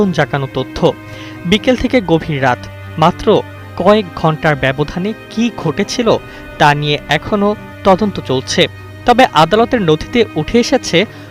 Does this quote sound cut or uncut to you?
cut